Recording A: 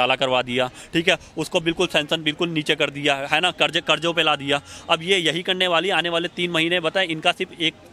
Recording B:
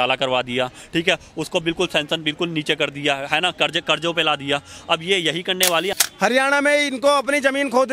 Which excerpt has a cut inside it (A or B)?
B